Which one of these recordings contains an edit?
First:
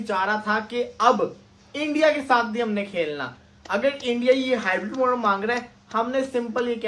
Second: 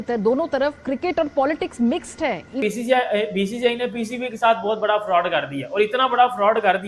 second; 1 cut; at 2.6 s

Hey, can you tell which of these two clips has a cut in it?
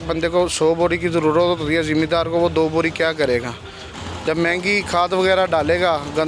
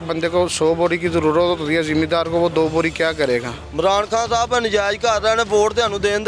second; 1 cut; at 3.6 s

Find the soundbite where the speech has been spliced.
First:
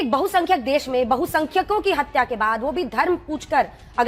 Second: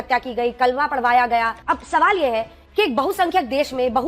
second; 1 cut; at 1.6 s

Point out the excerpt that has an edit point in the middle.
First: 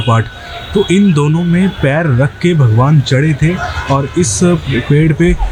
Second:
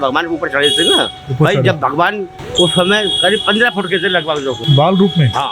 second; 2 cuts; at 2.4 s, 4.6 s

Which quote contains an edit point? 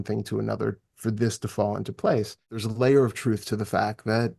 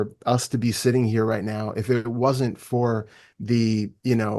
first; 1 cut; at 2.6 s

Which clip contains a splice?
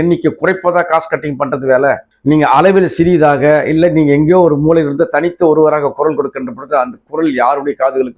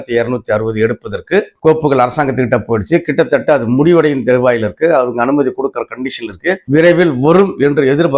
first; 1 cut; at 2.1 s

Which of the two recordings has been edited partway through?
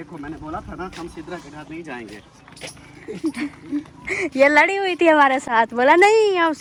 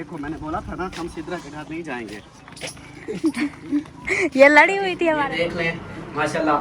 second; 1 cut; at 5.2 s

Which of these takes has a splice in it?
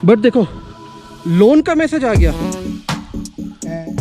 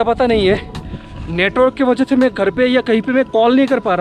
first; 1 cut; at 2.3 s

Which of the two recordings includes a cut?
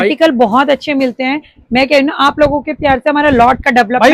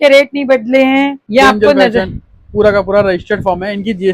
second; 1 cut; at 1.2 s

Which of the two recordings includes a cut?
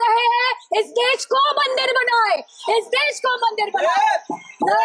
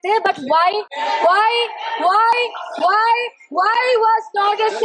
second; 1 cut; at 0.9 s

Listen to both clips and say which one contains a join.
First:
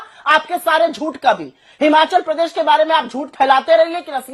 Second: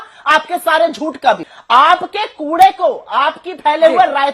second; 1 cut; at 1.5 s

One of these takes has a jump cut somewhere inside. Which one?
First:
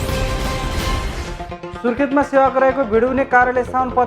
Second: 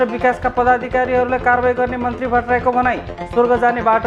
first; 1 cut; at 1.1 s

